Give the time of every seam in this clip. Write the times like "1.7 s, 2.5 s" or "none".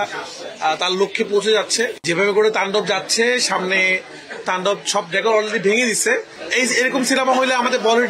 2.0 s, 6.4 s